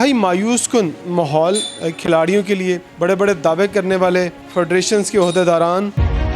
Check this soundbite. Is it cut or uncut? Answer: cut